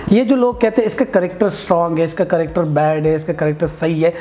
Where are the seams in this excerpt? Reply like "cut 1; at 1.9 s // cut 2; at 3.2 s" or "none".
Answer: none